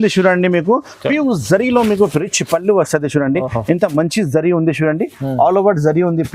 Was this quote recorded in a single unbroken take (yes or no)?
yes